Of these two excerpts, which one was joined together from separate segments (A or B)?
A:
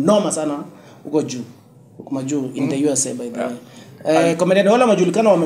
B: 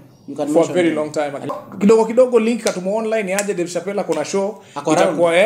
B